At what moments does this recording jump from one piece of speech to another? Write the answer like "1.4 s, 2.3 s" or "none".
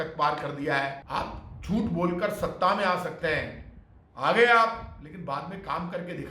1.0 s